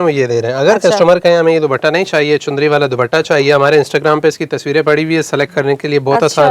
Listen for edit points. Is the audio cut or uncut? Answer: uncut